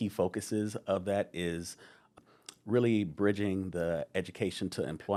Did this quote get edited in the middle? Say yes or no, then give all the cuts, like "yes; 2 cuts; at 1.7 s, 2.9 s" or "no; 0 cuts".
no; 0 cuts